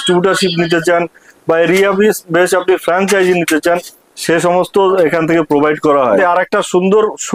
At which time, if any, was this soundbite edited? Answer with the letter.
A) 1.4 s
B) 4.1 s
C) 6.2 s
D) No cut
C